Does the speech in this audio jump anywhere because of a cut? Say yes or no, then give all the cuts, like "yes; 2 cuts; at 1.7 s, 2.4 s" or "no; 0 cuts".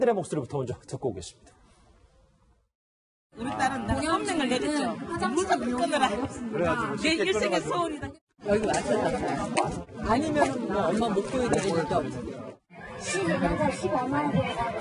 no; 0 cuts